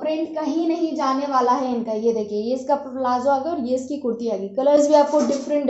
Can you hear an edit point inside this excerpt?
no; 0 cuts

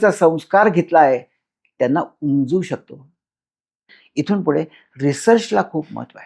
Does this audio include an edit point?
yes; 1 cut; at 4.0 s

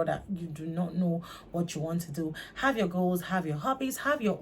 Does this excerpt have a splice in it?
no; 0 cuts

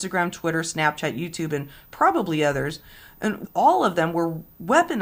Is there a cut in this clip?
yes; 1 cut; at 3.4 s

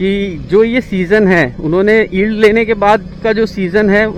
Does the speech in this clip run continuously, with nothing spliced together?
yes; 0 cuts

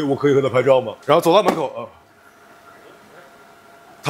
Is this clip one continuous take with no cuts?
no; 1 cut; at 0.9 s

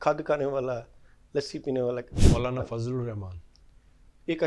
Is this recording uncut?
no; 1 cut; at 2.2 s

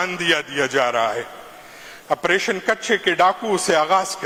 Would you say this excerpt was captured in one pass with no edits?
yes; 0 cuts

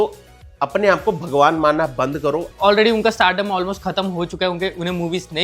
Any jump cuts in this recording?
yes; 1 cut; at 2.5 s

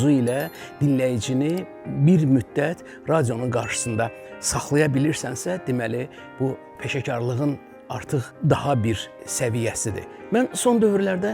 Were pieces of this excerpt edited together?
yes; 3 cuts; at 6.7 s, 8.3 s, 10.1 s

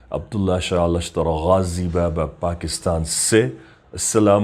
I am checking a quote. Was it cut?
no; 0 cuts

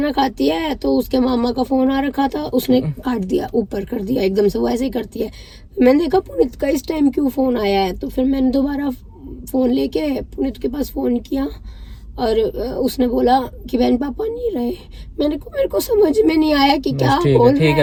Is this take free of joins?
yes; 0 cuts

